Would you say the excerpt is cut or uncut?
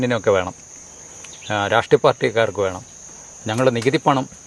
uncut